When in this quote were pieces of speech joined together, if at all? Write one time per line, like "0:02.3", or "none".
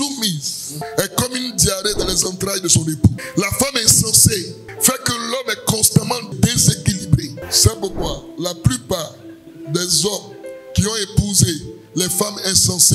0:07.4